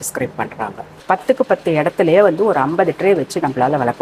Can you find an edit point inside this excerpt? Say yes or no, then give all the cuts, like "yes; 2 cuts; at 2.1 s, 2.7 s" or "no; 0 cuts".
yes; 1 cut; at 0.9 s